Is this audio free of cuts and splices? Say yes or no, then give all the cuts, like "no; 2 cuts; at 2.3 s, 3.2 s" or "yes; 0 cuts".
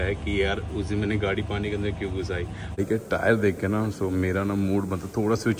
no; 1 cut; at 2.8 s